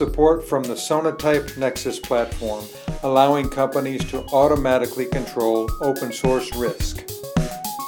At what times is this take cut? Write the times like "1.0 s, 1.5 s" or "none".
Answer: 6.9 s